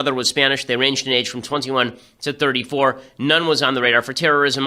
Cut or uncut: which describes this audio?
cut